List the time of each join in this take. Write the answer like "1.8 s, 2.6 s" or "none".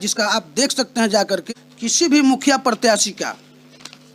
1.6 s